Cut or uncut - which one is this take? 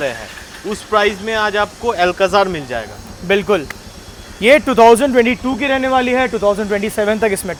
uncut